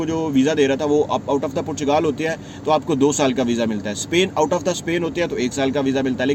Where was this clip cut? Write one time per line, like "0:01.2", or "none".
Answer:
none

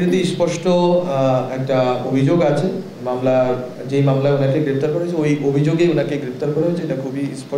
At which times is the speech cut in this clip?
none

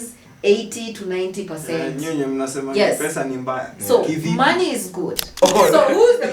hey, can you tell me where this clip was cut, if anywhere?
0:05.3

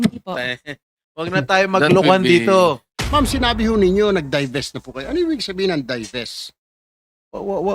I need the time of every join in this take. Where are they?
0:02.9

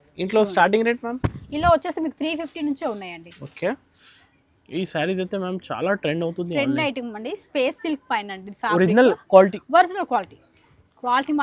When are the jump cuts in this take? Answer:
0:04.0

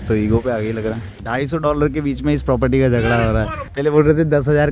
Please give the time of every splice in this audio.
0:01.2
0:03.7

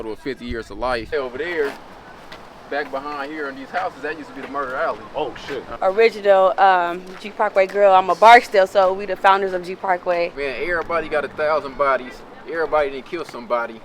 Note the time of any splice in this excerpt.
0:01.1
0:05.7
0:10.3

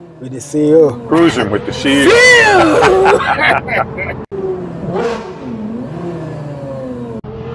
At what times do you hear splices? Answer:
0:04.2

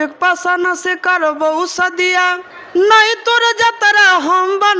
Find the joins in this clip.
0:02.5

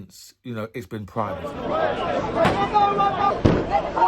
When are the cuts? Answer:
0:01.5

